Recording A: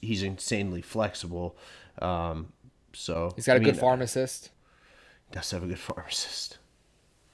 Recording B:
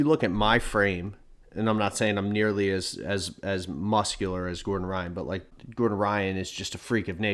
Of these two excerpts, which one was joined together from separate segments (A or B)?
B